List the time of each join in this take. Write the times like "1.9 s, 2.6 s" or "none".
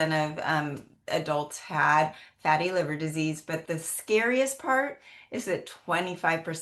none